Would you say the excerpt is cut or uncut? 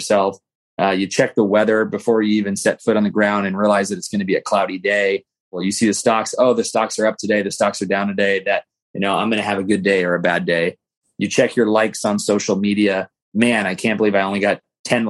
cut